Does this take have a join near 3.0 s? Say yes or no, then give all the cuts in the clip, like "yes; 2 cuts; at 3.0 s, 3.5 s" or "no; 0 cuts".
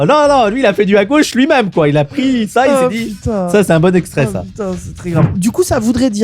no; 1 cut; at 5.3 s